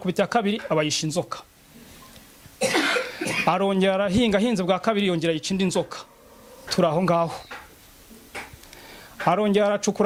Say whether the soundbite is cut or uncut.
uncut